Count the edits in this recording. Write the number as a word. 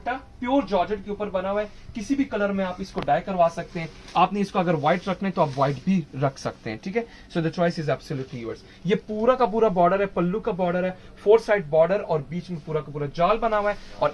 zero